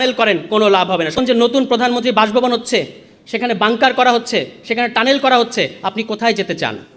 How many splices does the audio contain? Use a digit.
1